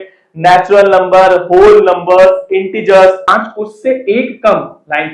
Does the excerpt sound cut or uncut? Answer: cut